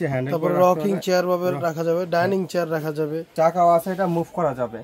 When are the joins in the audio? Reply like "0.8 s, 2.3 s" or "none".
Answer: 3.2 s